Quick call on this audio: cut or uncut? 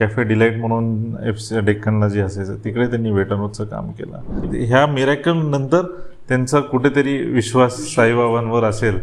cut